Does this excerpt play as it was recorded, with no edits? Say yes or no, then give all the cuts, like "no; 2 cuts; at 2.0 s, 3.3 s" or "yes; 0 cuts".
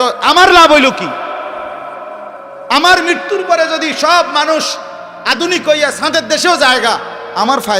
yes; 0 cuts